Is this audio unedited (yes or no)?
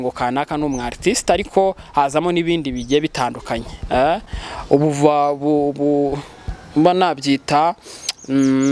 yes